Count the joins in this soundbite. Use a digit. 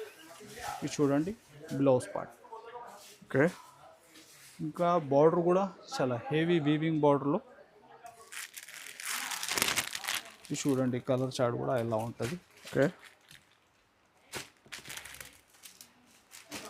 0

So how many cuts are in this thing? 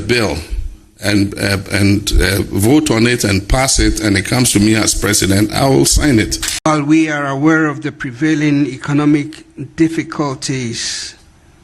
1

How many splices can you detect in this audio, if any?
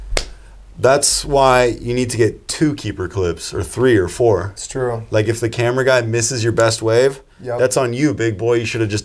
0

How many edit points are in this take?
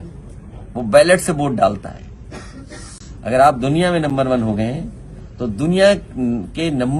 0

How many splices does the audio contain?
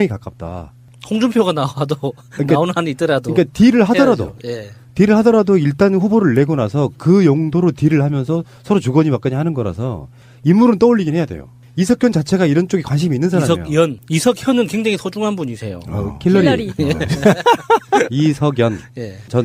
0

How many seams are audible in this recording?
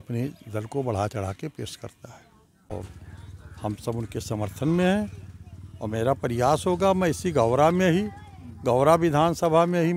1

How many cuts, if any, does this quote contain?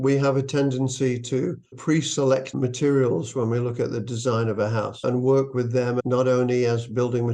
2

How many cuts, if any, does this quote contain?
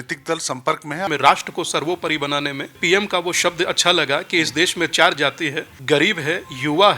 3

